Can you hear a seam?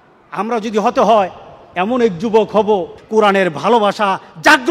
yes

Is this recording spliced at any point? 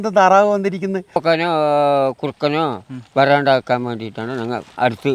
yes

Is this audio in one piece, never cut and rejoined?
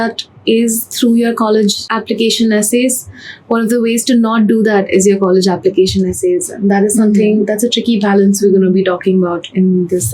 yes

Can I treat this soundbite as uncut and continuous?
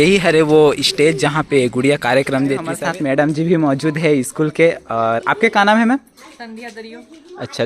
no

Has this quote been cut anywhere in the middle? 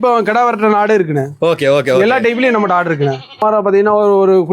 yes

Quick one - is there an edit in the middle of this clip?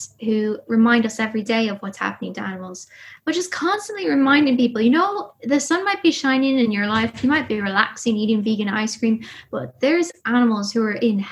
yes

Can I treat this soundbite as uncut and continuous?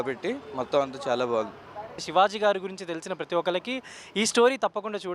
no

